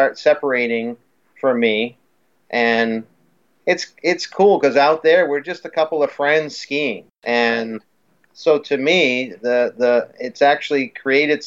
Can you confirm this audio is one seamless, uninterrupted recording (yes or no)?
no